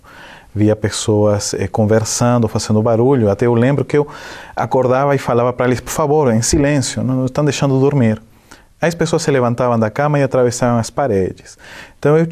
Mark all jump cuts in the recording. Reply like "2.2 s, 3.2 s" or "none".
none